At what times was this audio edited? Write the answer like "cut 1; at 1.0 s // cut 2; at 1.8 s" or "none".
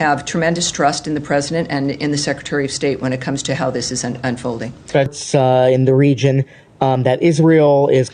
cut 1; at 5.1 s

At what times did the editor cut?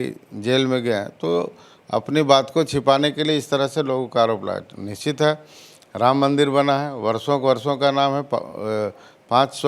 none

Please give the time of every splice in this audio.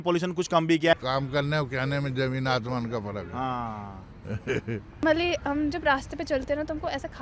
cut 1; at 0.9 s // cut 2; at 5.0 s

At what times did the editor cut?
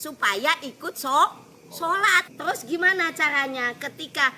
cut 1; at 2.2 s

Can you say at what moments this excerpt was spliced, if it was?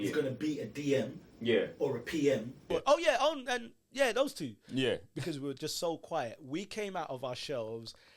cut 1; at 2.7 s

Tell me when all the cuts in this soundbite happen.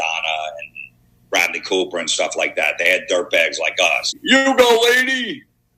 cut 1; at 4.2 s

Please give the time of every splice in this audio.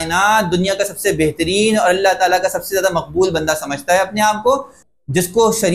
cut 1; at 4.8 s

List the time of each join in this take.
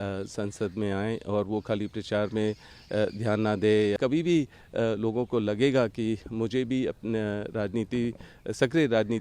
cut 1; at 4.0 s

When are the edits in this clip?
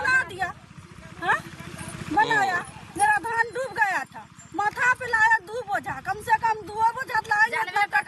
none

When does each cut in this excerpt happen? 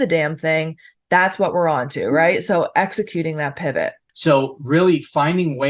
cut 1; at 4.1 s

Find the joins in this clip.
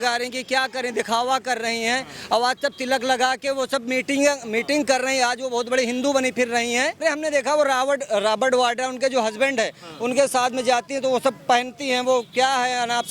cut 1; at 7.0 s

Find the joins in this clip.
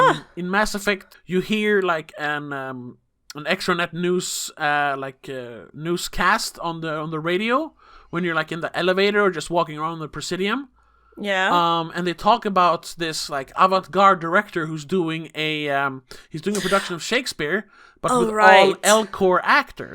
cut 1; at 1.1 s // cut 2; at 5.6 s

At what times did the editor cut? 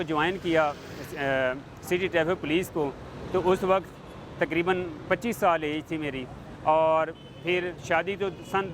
none

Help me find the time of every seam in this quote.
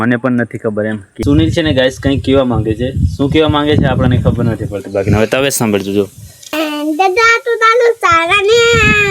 cut 1; at 1.1 s // cut 2; at 6.5 s

